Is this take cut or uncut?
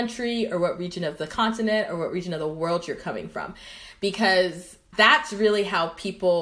uncut